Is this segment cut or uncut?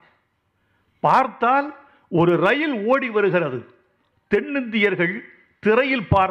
uncut